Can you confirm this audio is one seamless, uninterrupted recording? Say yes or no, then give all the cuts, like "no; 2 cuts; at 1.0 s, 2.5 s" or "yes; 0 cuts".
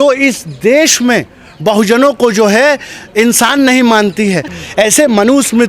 no; 1 cut; at 4.6 s